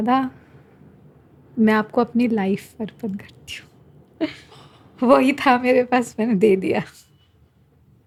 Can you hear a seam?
no; 0 cuts

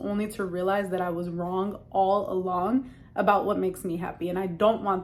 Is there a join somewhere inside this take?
no; 0 cuts

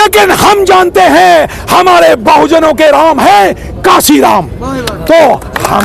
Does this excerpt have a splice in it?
no; 0 cuts

